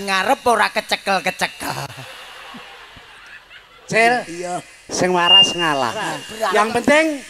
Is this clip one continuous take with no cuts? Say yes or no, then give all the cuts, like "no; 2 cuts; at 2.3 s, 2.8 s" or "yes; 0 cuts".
no; 1 cut; at 6.2 s